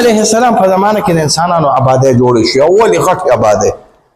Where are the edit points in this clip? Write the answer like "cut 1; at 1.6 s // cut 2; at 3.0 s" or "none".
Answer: none